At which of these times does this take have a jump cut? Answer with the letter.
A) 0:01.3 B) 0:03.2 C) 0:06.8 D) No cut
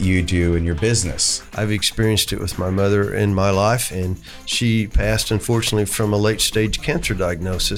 A